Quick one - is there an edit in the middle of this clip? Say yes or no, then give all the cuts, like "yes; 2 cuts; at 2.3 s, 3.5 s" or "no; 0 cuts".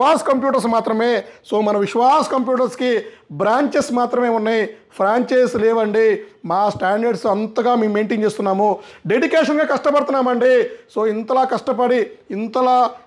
no; 0 cuts